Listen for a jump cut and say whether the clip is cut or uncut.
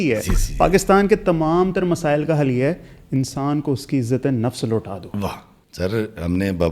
cut